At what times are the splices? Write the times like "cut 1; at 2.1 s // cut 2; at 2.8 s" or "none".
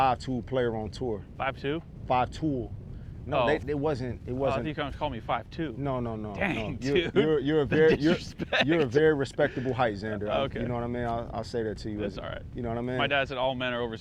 cut 1; at 1.3 s